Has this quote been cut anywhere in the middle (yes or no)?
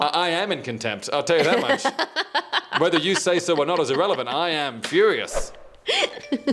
no